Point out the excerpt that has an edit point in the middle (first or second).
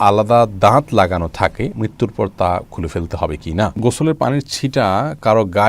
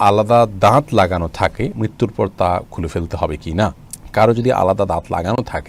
first